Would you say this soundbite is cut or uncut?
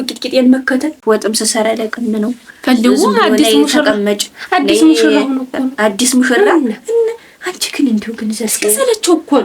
cut